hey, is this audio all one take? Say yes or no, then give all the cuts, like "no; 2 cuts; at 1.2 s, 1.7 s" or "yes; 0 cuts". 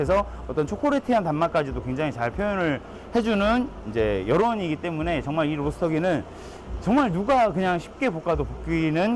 yes; 0 cuts